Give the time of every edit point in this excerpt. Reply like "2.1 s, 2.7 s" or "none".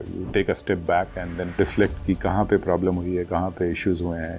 1.5 s